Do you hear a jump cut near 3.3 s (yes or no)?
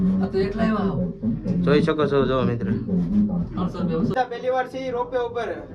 no